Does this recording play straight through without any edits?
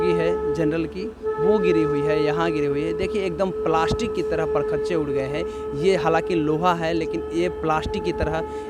yes; 0 cuts

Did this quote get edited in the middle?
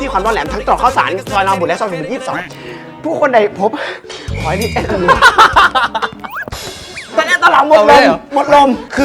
no; 0 cuts

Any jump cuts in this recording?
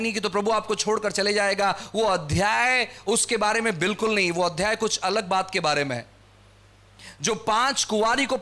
no; 0 cuts

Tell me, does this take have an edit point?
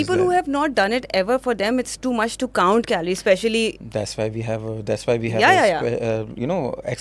no; 0 cuts

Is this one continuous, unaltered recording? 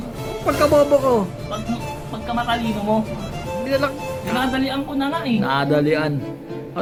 yes; 0 cuts

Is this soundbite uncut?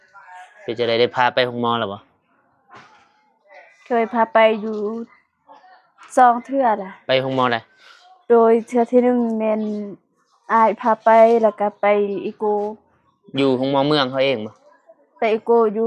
yes; 0 cuts

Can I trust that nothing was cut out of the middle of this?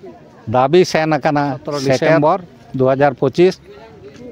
no; 1 cut; at 2.2 s

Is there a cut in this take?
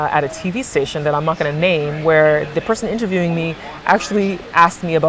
no; 0 cuts

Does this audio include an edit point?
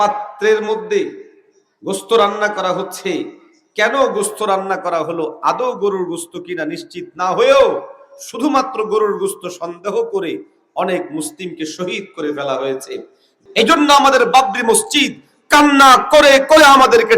yes; 1 cut; at 13.4 s

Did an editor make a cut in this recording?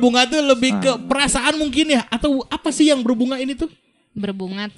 no; 0 cuts

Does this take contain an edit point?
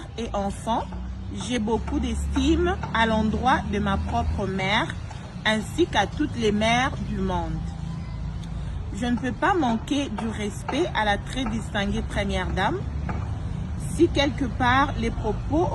no; 0 cuts

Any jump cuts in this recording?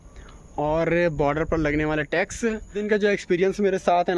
yes; 1 cut; at 2.8 s

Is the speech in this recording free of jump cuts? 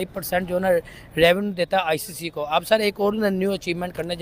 yes; 0 cuts

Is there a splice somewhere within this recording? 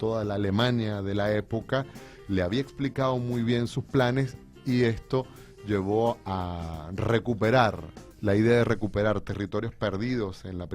yes; 1 cut; at 6.4 s

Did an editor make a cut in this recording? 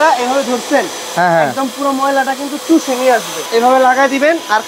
yes; 1 cut; at 3.4 s

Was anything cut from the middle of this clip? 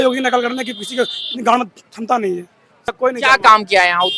yes; 1 cut; at 2.9 s

